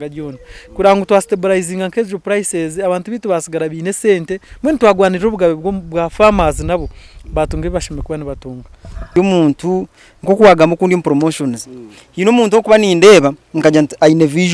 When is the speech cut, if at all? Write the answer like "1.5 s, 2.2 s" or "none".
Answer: 9.1 s